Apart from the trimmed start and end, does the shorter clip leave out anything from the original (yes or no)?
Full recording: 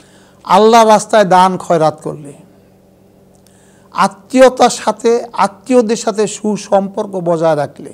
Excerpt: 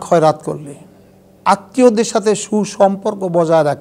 yes